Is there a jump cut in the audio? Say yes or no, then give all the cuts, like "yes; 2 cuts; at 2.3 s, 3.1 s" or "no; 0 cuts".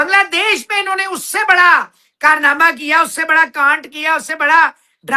no; 0 cuts